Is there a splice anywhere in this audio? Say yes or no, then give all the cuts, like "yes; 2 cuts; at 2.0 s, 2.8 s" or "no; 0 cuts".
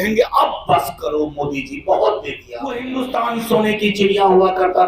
yes; 1 cut; at 2.8 s